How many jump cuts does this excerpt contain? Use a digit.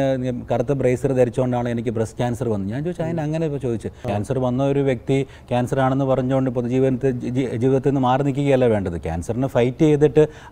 1